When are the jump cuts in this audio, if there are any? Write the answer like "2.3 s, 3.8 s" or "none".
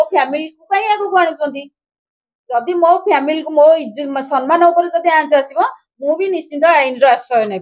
none